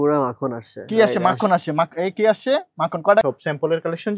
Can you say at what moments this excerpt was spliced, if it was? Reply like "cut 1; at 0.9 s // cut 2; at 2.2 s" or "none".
cut 1; at 3.2 s